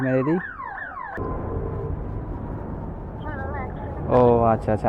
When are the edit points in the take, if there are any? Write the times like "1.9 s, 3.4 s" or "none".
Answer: 1.2 s